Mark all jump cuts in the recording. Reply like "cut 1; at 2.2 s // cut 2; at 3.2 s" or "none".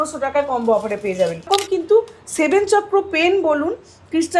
cut 1; at 1.5 s